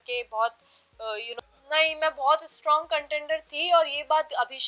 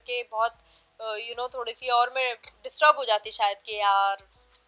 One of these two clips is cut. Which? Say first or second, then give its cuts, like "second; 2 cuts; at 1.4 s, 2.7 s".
first; 1 cut; at 1.3 s